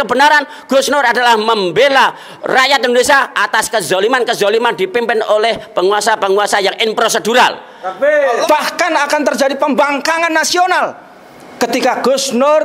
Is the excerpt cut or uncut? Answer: cut